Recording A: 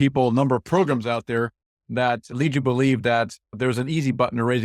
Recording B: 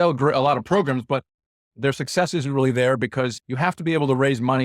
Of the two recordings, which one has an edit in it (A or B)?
B